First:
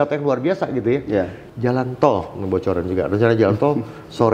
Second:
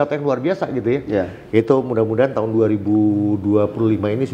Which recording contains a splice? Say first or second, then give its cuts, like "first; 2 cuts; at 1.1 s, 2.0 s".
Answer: first; 1 cut; at 1.4 s